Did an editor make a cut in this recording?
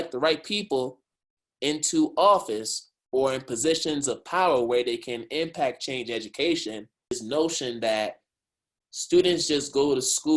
yes; 1 cut; at 7.2 s

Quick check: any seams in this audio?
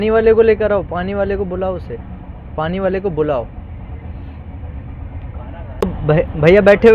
yes; 1 cut; at 6.0 s

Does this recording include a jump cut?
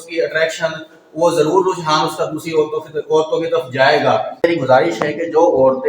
yes; 1 cut; at 4.4 s

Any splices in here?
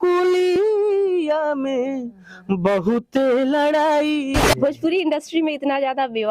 yes; 1 cut; at 4.4 s

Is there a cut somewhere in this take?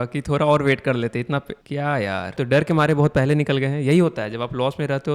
yes; 1 cut; at 2.3 s

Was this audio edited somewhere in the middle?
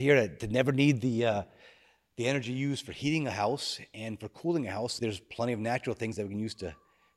yes; 1 cut; at 4.9 s

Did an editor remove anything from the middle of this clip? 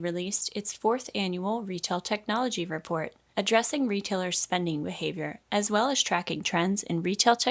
no; 0 cuts

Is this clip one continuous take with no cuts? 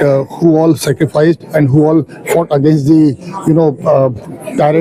yes; 0 cuts

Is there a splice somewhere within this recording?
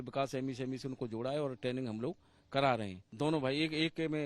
yes; 1 cut; at 3.0 s

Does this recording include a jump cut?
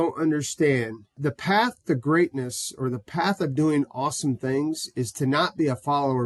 no; 0 cuts

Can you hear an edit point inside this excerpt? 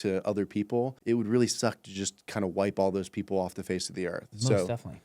yes; 1 cut; at 1.0 s

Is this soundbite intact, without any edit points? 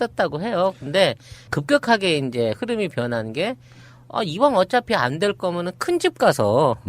no; 1 cut; at 4.1 s

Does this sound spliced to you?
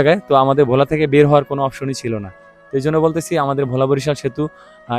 no; 0 cuts

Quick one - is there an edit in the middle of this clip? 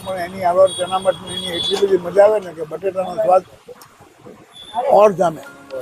no; 0 cuts

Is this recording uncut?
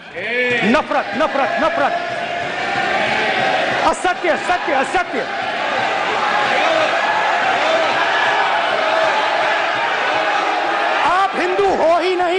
yes; 0 cuts

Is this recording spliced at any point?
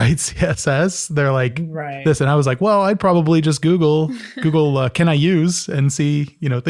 no; 0 cuts

